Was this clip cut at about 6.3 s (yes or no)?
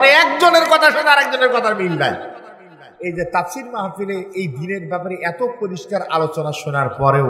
no